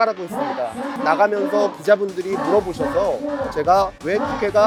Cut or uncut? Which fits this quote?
uncut